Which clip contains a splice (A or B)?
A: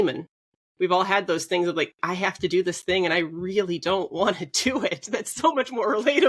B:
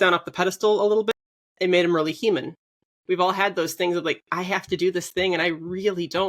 B